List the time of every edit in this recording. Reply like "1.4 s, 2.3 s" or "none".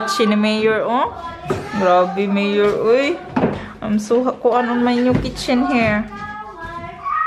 none